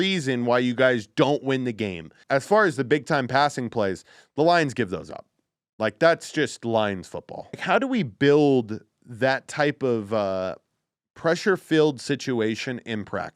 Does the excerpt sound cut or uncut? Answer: cut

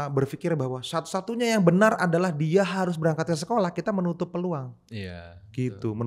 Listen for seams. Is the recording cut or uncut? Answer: uncut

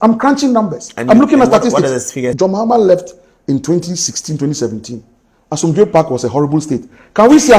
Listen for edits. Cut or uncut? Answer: cut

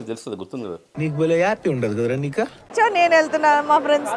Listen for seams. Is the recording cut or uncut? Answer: cut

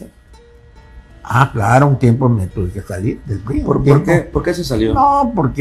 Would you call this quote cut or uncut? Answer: uncut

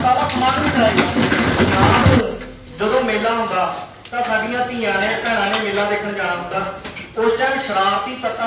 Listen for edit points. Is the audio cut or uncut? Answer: cut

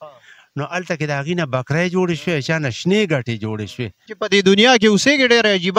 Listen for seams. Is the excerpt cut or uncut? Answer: cut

